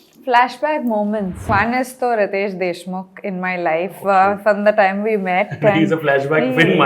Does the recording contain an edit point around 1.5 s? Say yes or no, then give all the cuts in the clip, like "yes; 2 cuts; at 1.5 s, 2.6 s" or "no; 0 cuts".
yes; 1 cut; at 1.5 s